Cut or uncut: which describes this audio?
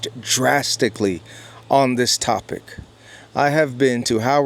uncut